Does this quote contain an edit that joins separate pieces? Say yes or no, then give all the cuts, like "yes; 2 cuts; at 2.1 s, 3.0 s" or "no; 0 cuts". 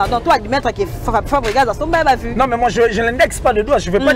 no; 0 cuts